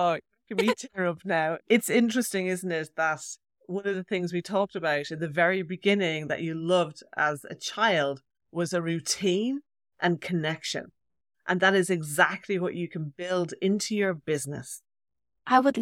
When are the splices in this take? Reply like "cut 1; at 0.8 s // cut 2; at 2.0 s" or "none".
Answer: none